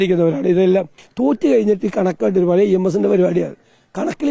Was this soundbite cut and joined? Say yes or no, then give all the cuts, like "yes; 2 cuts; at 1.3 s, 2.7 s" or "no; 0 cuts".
yes; 1 cut; at 1.0 s